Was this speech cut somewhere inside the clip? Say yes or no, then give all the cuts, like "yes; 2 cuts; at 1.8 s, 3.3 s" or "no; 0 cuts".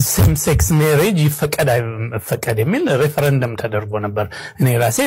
no; 0 cuts